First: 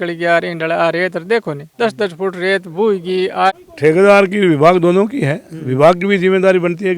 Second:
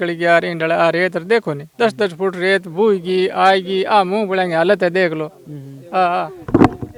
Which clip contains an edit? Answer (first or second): first